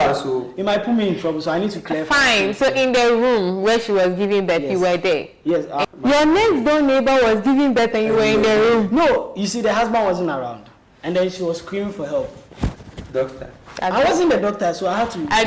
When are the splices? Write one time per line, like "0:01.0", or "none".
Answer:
0:05.8